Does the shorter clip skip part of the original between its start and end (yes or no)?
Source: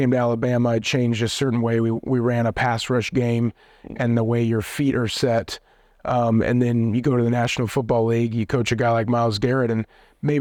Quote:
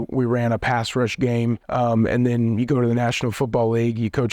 yes